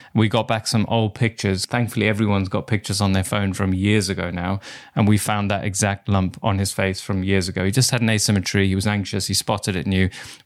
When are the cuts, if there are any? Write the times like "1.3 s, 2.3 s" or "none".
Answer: 1.6 s